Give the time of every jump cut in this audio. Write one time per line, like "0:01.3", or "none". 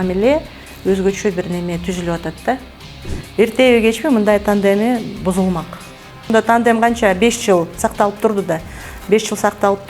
0:03.2
0:06.3